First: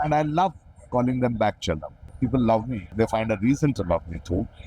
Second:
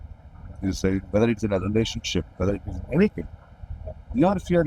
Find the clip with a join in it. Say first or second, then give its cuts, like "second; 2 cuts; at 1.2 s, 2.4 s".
first; 2 cuts; at 2.1 s, 2.9 s